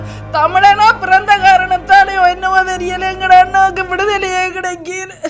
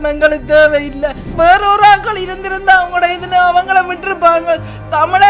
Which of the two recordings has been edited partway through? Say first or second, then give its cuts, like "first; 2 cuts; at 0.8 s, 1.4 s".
second; 1 cut; at 1.3 s